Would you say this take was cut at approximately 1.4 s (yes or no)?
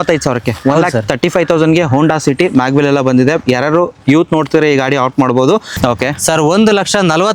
no